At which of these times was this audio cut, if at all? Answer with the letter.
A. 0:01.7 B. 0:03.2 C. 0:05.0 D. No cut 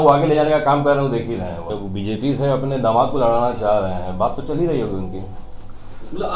A